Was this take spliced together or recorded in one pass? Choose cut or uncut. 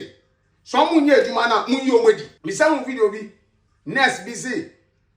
cut